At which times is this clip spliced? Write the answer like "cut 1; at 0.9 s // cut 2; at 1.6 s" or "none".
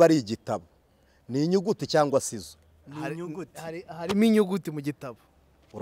none